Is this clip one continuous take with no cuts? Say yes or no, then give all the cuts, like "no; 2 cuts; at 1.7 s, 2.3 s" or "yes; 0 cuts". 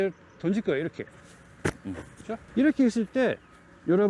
no; 1 cut; at 2.5 s